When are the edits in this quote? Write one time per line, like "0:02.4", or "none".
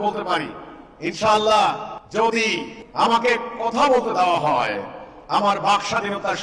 0:01.9
0:02.8